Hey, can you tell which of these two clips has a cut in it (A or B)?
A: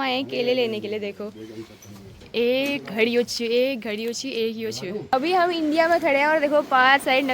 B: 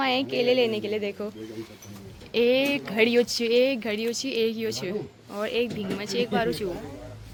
A